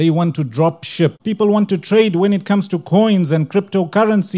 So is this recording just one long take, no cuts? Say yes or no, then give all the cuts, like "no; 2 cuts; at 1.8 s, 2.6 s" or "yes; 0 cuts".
no; 1 cut; at 1.2 s